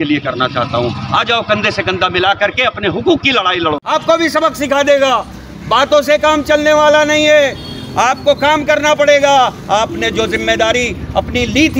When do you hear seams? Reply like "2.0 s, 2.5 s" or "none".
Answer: 3.8 s